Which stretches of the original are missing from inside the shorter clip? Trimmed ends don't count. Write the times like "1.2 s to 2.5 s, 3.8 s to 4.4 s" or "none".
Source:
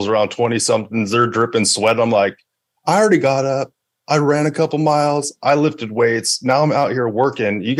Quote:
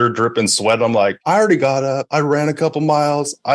2.4 s to 2.8 s, 3.7 s to 4.0 s

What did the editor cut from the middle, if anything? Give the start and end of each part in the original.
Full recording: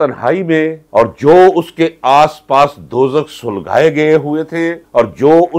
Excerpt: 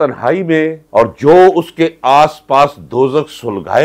none

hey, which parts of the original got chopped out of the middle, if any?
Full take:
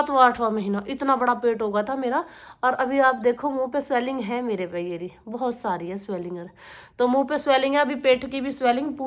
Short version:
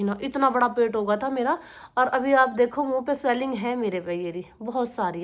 none

